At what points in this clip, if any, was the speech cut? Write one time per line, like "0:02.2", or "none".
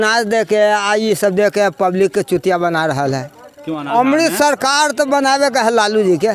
0:03.9